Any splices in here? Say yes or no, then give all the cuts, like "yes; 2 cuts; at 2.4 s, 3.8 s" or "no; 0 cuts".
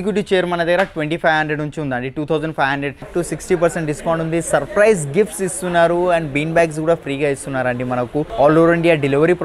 yes; 2 cuts; at 3.1 s, 8.3 s